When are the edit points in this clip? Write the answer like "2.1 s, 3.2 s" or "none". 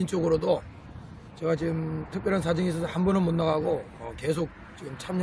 3.7 s

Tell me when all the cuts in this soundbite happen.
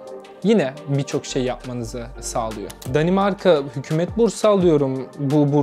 2.7 s

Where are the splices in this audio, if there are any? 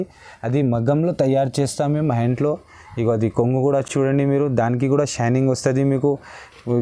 none

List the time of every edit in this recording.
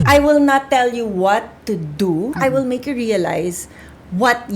2.3 s

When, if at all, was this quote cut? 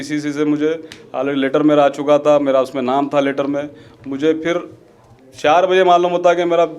none

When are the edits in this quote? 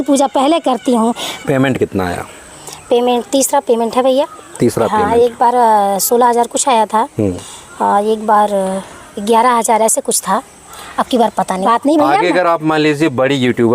1.3 s, 11.6 s

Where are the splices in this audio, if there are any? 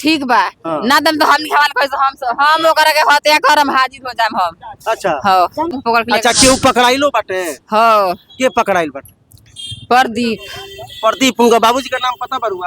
5.7 s

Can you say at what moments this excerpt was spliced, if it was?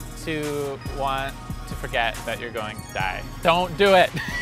3.3 s

